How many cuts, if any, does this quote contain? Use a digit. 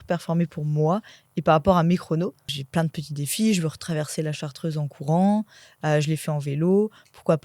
1